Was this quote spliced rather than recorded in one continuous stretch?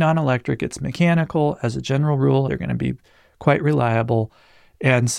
yes; 1 cut; at 2.5 s

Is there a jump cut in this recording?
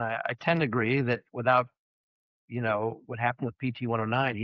no; 0 cuts

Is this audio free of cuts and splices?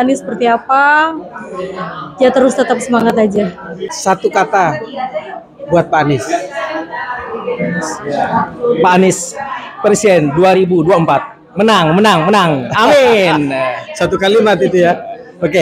no; 1 cut; at 3.9 s

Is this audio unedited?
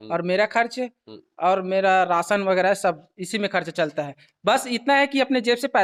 yes; 0 cuts

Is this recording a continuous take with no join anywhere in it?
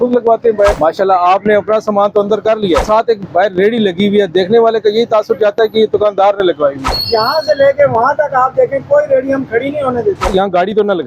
no; 4 cuts; at 0.8 s, 2.9 s, 6.9 s, 10.3 s

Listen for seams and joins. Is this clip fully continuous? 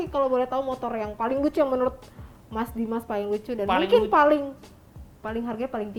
yes; 0 cuts

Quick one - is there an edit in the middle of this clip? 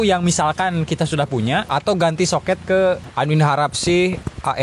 yes; 1 cut; at 3.0 s

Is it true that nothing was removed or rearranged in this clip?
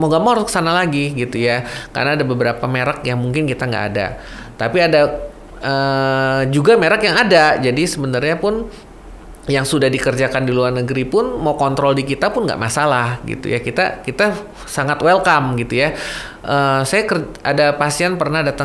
yes; 0 cuts

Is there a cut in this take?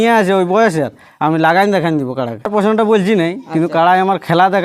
yes; 1 cut; at 2.5 s

